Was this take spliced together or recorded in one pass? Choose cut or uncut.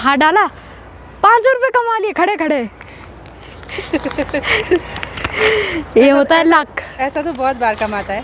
uncut